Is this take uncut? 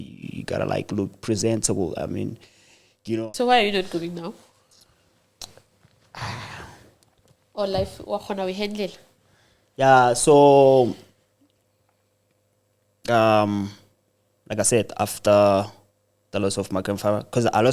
no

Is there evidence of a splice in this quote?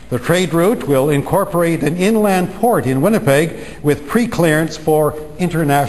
no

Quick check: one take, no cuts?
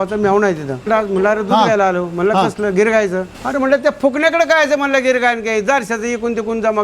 no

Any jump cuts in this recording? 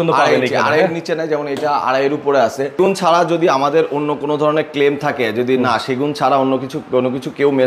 yes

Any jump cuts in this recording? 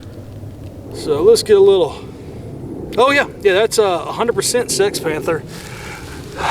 yes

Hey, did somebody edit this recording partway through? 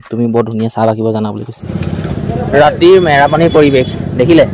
yes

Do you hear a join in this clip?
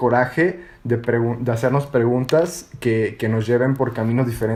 no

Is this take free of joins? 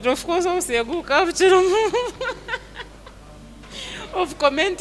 yes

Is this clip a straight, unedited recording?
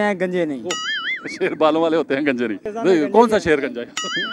no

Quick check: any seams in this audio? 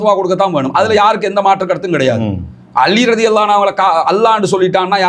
no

